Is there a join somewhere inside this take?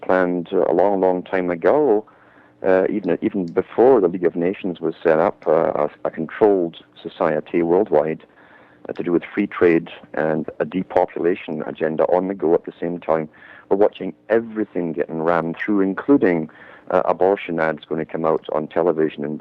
yes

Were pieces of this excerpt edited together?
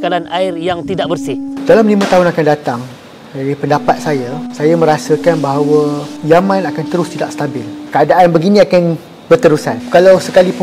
yes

